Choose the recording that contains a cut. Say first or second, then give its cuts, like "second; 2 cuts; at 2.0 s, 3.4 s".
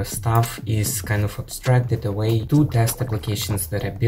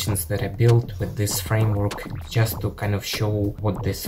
first; 1 cut; at 2.4 s